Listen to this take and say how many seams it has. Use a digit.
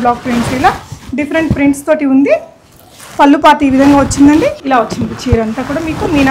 1